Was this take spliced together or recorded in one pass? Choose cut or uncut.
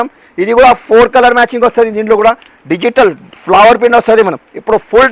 uncut